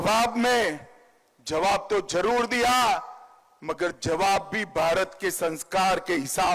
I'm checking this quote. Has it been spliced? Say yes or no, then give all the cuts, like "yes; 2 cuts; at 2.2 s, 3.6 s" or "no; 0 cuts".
no; 0 cuts